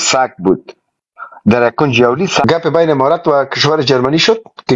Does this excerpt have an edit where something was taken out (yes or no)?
yes